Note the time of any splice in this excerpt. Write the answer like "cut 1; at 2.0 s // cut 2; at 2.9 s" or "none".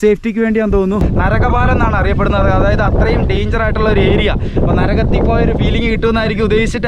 cut 1; at 1.1 s